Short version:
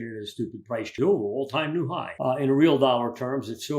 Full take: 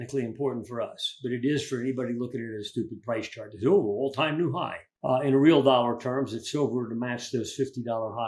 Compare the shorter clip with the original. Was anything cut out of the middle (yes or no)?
yes